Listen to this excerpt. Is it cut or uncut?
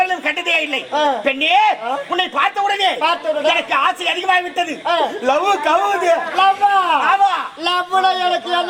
uncut